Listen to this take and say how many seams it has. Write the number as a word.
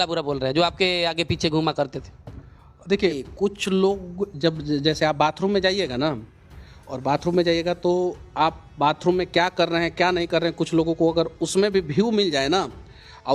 one